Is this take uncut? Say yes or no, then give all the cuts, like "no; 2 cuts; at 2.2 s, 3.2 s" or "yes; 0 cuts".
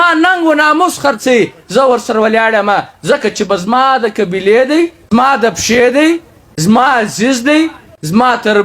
no; 1 cut; at 5.0 s